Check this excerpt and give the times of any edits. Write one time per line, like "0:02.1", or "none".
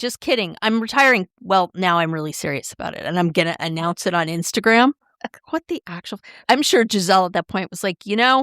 0:06.4